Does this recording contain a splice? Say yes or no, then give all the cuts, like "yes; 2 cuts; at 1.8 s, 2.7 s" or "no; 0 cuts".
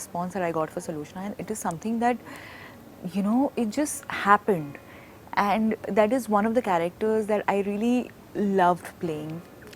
no; 0 cuts